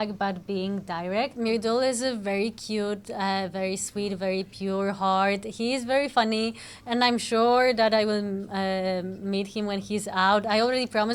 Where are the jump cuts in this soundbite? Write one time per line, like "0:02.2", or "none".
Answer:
0:01.4